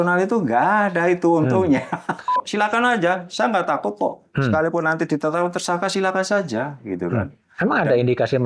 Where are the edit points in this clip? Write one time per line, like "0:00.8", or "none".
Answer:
0:02.4